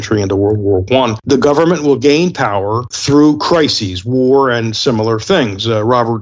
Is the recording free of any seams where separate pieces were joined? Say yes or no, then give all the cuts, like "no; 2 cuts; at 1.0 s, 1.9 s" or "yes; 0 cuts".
no; 2 cuts; at 1.2 s, 2.9 s